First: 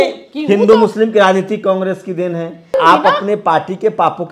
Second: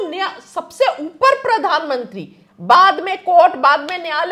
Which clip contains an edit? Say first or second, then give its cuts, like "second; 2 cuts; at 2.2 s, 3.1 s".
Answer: first; 1 cut; at 2.8 s